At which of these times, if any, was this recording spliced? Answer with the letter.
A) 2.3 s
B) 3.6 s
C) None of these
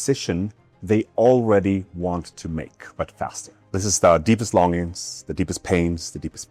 B